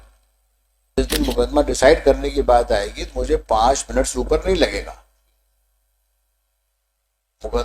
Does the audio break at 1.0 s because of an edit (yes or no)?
yes